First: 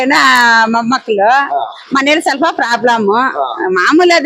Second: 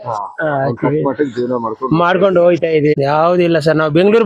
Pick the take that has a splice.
second; 1 cut; at 3.0 s

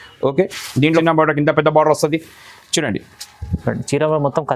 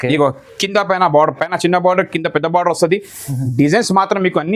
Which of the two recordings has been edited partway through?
first; 1 cut; at 1.0 s

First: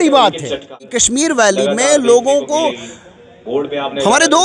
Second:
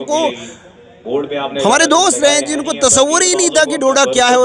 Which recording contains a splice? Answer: first; 1 cut; at 0.9 s

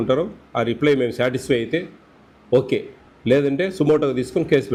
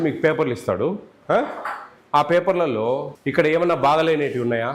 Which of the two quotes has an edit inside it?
second; 1 cut; at 3.2 s

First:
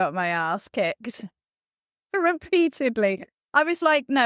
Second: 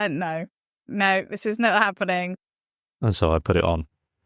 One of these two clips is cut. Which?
second; 2 cuts; at 0.8 s, 2.4 s

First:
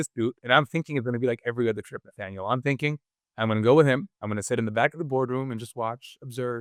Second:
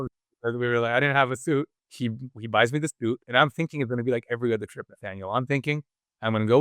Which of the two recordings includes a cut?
second; 1 cut; at 1.8 s

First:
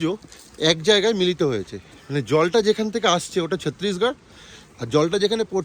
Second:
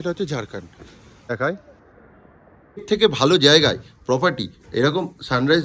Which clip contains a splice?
second; 1 cut; at 2.8 s

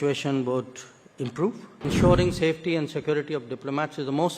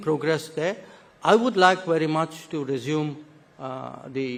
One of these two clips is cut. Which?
first; 1 cut; at 1.8 s

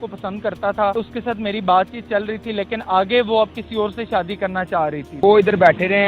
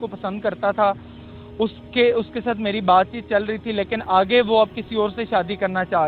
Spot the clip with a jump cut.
first; 2 cuts; at 0.9 s, 5.1 s

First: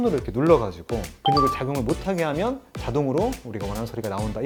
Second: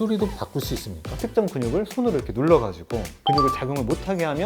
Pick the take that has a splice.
second; 1 cut; at 1.0 s

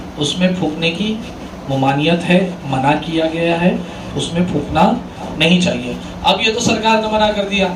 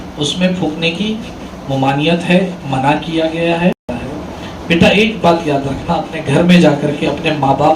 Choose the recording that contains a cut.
second; 1 cut; at 3.8 s

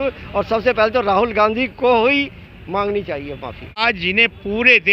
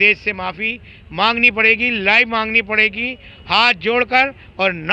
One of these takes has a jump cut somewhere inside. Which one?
first; 1 cut; at 3.8 s

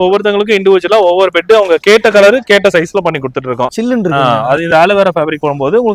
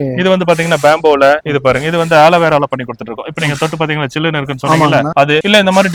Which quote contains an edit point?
first; 1 cut; at 3.7 s

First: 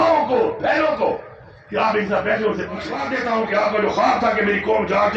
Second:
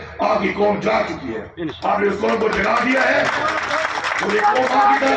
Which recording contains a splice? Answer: first; 1 cut; at 3.0 s

